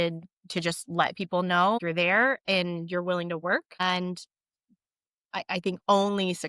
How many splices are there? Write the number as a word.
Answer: two